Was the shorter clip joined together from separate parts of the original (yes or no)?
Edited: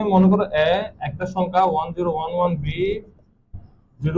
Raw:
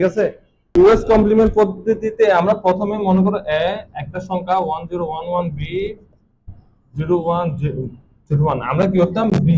no